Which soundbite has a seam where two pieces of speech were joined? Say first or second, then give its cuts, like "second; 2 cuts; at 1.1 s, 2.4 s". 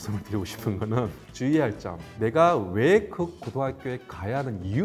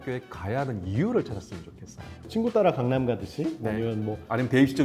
second; 1 cut; at 2.1 s